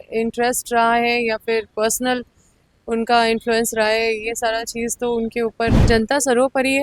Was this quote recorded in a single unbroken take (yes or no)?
no